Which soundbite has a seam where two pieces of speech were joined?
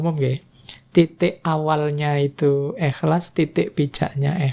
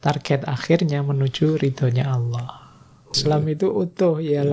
second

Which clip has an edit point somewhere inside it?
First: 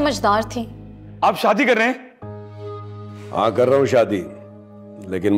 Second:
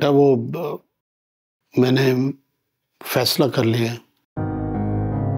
first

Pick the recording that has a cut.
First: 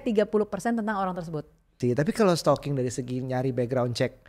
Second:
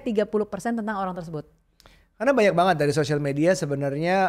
first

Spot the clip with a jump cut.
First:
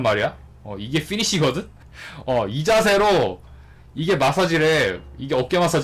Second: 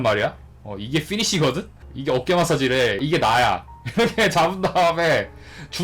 second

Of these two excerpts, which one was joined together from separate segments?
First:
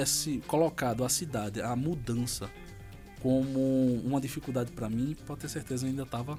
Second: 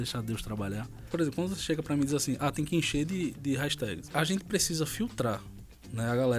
second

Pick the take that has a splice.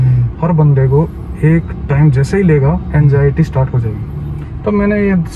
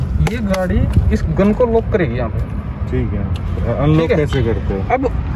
first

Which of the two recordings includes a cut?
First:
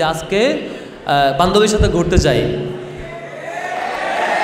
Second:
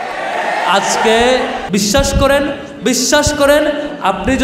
second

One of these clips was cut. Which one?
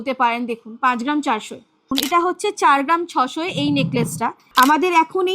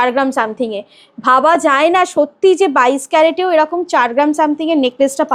first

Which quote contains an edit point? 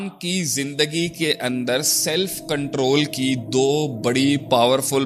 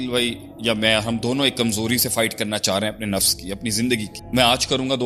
second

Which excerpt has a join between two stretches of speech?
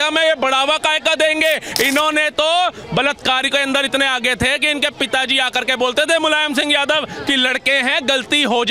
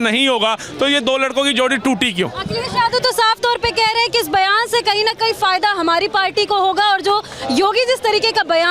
first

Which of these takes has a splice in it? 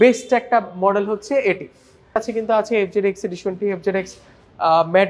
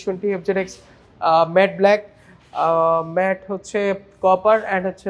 first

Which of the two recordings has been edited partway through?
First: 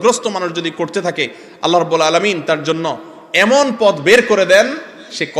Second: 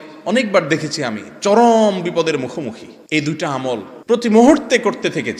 second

